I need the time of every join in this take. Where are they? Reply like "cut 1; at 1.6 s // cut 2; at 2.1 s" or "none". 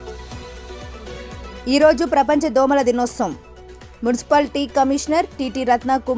cut 1; at 1.1 s